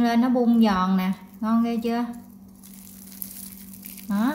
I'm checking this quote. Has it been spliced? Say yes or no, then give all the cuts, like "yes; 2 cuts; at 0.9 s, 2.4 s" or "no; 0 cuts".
no; 0 cuts